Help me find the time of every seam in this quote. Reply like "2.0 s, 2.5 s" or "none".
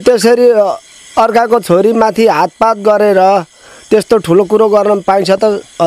none